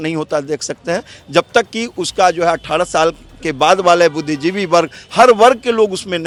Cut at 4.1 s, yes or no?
no